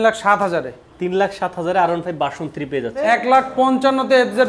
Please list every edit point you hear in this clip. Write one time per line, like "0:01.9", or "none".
0:03.0